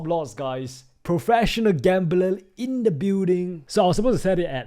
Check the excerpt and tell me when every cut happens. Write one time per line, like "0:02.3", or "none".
0:03.6